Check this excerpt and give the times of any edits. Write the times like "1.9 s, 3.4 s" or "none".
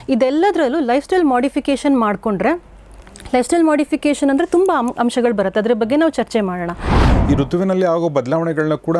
7.0 s